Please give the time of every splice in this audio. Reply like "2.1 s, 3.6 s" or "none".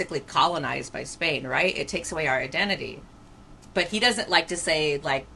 none